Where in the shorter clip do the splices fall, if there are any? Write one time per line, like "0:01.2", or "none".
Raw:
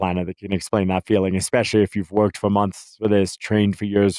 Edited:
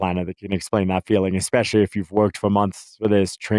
none